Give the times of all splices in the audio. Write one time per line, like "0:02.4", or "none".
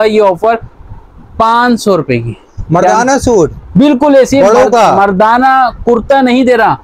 none